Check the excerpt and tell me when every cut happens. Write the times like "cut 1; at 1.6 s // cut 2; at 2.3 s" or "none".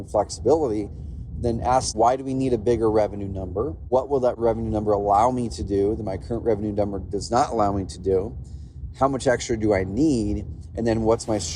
cut 1; at 1.9 s // cut 2; at 4.3 s